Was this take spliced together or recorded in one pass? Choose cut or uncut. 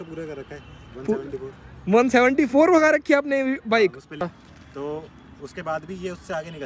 cut